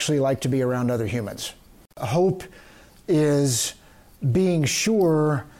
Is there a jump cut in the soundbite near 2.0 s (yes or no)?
yes